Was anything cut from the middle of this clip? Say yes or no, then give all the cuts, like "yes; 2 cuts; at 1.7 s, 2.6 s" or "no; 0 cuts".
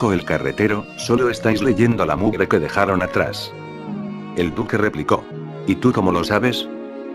no; 0 cuts